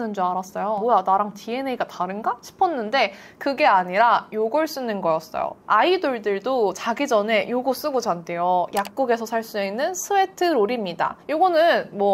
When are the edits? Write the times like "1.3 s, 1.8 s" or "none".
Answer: none